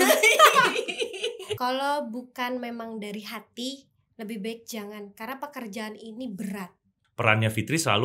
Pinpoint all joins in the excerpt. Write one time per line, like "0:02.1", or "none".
0:01.6
0:07.0